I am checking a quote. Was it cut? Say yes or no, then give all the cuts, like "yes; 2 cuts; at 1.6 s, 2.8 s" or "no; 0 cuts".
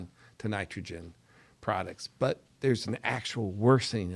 yes; 1 cut; at 2.5 s